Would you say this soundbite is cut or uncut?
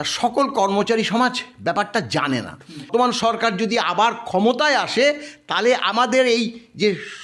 cut